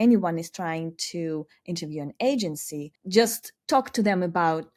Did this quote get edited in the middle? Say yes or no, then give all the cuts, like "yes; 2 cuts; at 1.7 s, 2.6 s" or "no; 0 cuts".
no; 0 cuts